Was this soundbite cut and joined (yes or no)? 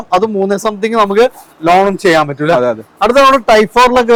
no